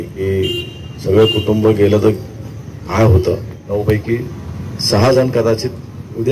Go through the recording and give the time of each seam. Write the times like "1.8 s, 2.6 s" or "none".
3.5 s

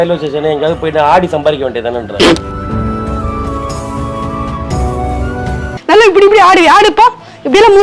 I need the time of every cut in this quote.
5.7 s

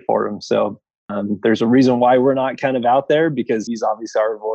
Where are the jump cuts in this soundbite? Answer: 1.1 s, 3.6 s

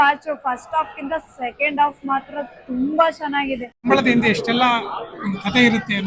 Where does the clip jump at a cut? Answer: 3.9 s

